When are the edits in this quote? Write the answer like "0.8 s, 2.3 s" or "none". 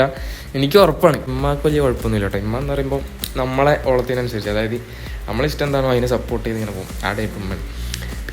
1.3 s